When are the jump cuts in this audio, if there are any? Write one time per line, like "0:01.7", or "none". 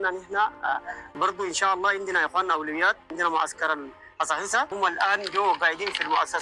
0:01.1
0:04.7